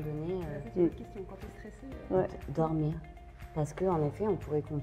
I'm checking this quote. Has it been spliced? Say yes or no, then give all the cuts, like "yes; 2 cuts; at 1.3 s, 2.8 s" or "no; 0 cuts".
no; 0 cuts